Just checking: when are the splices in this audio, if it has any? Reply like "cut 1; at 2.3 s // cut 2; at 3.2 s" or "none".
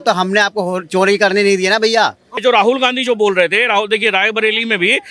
cut 1; at 2.4 s